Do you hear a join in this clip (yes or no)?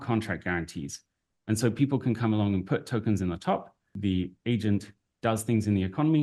yes